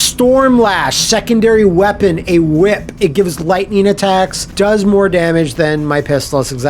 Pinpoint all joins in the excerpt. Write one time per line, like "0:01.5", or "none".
0:04.4